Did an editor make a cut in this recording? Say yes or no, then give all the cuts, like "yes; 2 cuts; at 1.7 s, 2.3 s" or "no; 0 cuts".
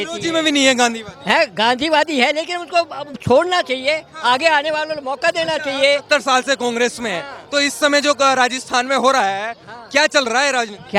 no; 0 cuts